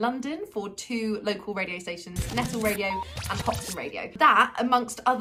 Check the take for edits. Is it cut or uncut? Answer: uncut